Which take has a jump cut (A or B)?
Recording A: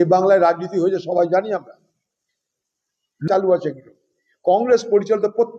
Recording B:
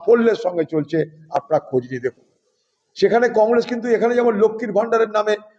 A